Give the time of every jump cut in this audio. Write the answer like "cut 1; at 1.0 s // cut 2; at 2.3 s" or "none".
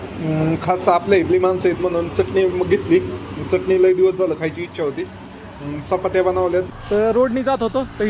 cut 1; at 6.8 s